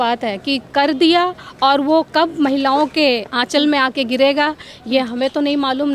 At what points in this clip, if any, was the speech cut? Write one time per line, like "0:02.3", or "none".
none